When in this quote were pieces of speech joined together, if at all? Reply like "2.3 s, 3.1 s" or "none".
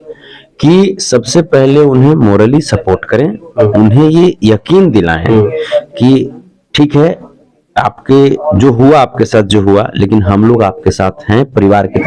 none

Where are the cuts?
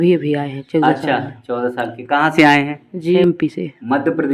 3.2 s

